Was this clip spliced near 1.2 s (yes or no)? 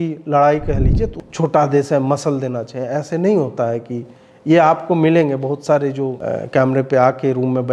yes